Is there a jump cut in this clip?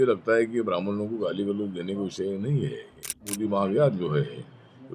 yes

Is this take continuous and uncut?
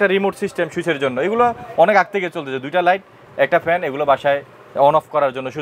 yes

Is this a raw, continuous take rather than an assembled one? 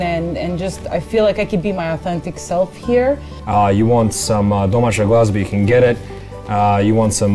no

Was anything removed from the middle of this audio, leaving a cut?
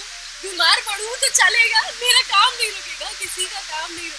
no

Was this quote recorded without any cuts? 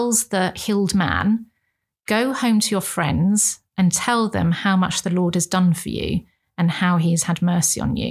yes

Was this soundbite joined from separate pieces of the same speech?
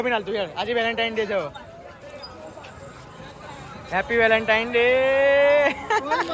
no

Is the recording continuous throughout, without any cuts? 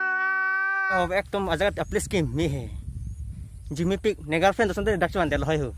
no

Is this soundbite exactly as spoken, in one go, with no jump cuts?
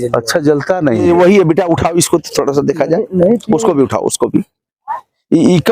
no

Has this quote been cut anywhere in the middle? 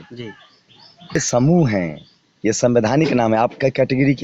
yes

